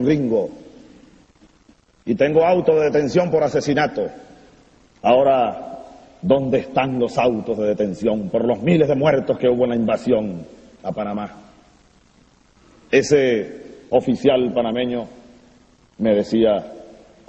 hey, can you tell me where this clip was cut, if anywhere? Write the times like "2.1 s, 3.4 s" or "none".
12.1 s

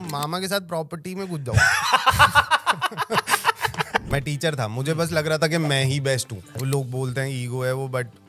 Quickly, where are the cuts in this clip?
4.1 s, 6.4 s

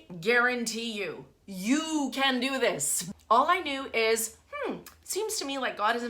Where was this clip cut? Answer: 3.0 s

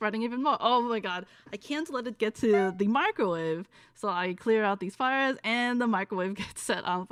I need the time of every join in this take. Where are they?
none

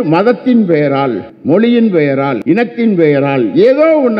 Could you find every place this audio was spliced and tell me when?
1.3 s, 2.4 s

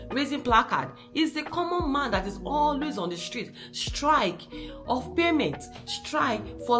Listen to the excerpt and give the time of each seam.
none

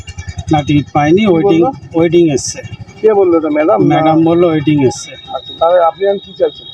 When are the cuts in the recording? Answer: none

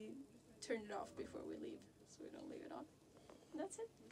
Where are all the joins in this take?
none

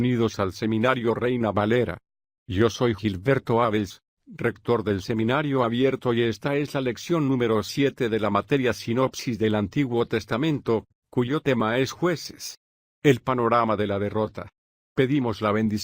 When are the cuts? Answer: none

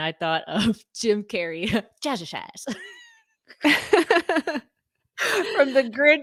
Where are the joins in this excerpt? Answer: none

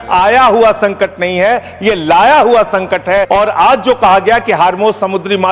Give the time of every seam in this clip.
3.3 s

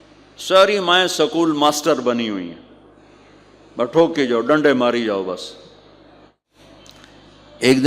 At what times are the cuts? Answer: 6.5 s

